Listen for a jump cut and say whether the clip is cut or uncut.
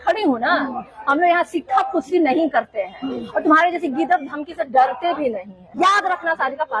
cut